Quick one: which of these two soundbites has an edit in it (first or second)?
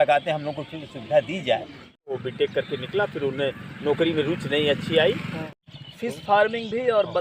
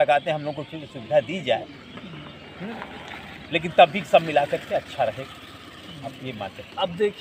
first